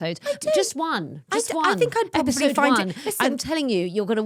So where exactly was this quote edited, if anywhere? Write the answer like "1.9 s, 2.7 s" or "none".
none